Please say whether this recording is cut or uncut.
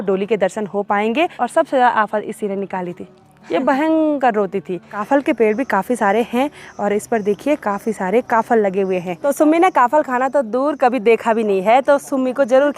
cut